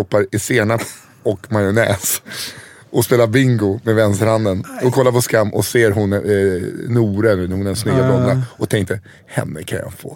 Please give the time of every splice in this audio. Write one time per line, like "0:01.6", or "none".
none